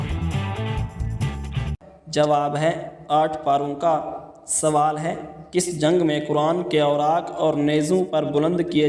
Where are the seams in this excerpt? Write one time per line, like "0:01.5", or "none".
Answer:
0:01.9